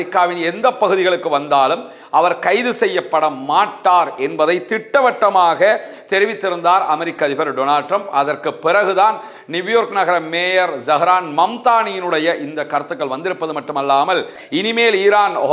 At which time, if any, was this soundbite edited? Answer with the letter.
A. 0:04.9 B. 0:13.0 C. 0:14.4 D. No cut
C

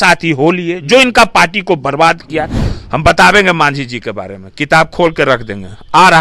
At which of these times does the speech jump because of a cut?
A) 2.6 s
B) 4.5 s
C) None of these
A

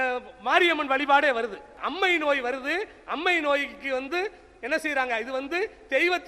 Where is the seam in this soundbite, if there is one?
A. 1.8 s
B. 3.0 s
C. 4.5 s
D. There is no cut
A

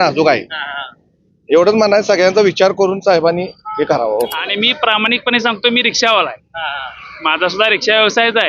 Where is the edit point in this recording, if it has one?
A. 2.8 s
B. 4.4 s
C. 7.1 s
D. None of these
B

